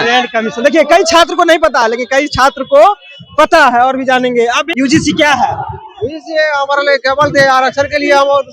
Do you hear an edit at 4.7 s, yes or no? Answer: yes